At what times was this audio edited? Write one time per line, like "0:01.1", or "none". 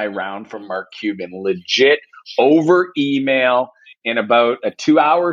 none